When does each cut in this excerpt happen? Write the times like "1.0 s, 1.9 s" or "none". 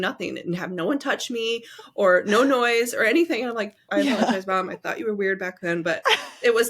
3.9 s